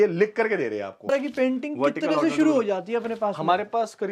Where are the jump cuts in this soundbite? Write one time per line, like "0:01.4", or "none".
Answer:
0:01.1